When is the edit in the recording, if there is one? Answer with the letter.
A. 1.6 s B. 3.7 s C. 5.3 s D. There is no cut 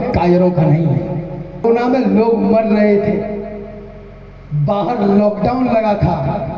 A